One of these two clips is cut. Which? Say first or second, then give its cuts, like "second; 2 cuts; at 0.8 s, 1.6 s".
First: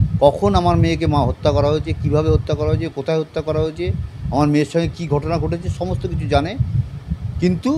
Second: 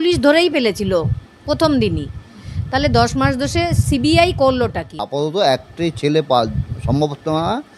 second; 1 cut; at 5.0 s